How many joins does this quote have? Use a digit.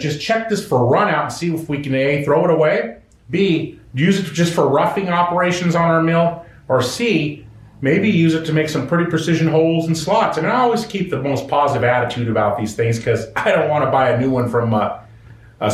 0